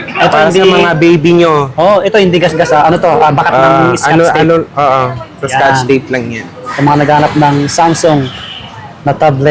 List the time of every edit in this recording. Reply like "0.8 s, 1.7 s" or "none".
6.7 s